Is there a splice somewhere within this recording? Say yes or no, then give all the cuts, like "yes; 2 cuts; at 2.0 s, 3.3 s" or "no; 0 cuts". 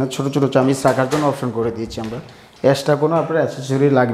no; 0 cuts